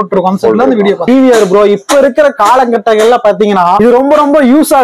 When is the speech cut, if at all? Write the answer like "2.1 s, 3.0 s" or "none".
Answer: 1.0 s, 3.8 s